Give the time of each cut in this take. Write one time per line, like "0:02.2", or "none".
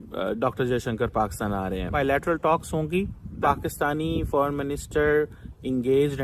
0:02.0
0:03.4